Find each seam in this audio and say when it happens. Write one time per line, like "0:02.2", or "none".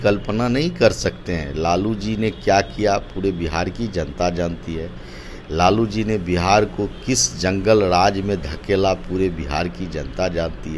none